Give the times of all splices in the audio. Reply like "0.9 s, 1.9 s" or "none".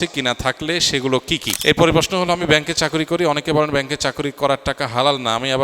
1.5 s